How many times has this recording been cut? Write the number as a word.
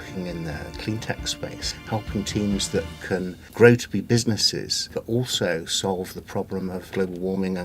four